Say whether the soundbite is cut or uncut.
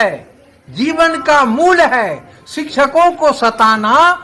uncut